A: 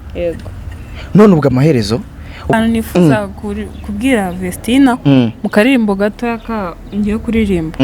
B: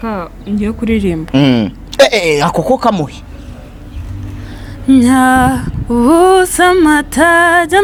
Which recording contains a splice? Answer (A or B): A